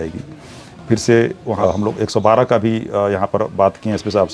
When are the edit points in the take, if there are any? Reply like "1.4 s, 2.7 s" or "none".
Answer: 1.6 s